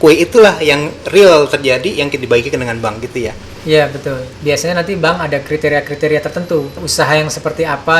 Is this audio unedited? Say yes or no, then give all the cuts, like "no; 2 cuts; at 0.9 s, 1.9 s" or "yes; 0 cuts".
no; 2 cuts; at 4.3 s, 6.8 s